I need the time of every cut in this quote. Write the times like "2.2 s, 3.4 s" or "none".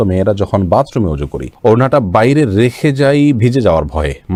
none

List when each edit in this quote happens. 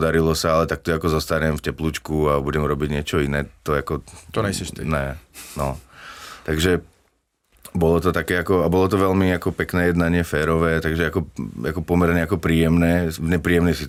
none

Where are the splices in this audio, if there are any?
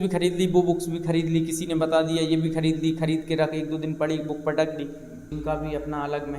5.3 s

